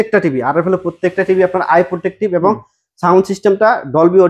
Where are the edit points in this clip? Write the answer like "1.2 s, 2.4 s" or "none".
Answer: none